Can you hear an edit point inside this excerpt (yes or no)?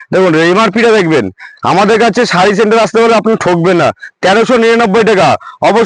no